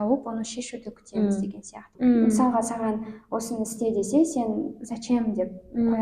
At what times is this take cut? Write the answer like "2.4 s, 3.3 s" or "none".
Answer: 1.8 s